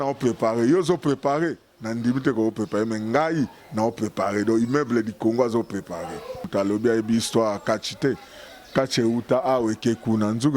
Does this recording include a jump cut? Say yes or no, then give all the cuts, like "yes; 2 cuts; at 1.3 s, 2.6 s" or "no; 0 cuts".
yes; 1 cut; at 6.5 s